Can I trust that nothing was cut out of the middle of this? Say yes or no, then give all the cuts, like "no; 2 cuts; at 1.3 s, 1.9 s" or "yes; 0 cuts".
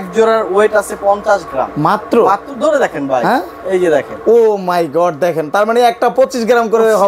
yes; 0 cuts